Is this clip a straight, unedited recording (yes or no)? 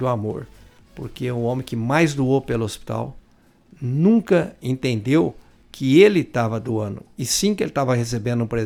yes